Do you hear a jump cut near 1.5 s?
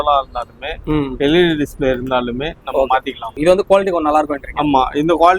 no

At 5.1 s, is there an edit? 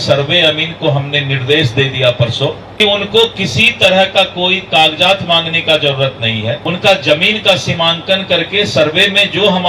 no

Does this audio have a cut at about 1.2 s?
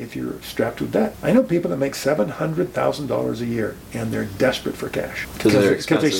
yes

